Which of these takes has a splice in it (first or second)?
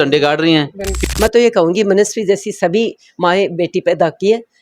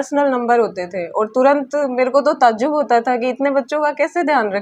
first